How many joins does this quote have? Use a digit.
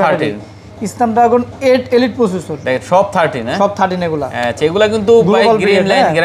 0